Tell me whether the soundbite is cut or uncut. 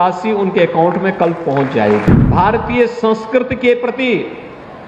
cut